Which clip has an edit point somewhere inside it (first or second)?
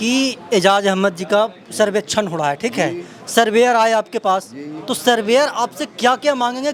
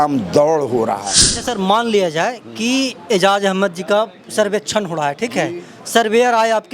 second